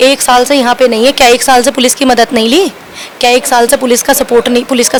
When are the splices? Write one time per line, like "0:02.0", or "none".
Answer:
none